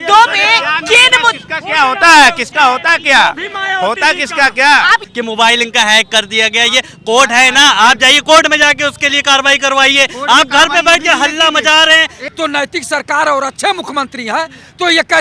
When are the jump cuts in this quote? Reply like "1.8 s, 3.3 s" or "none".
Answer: 5.1 s, 12.2 s